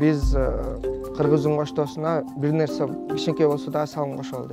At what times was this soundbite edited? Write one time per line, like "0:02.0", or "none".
none